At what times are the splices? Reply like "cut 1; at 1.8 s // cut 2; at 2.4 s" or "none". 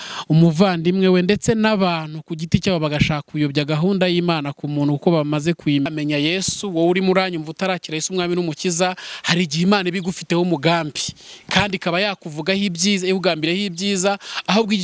cut 1; at 5.9 s